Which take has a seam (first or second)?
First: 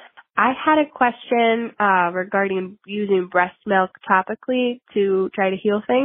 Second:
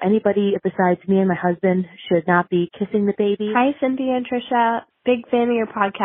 second